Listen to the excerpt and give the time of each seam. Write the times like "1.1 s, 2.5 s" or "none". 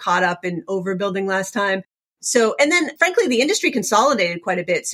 2.2 s, 2.9 s

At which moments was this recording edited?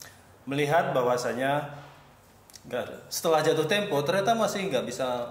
none

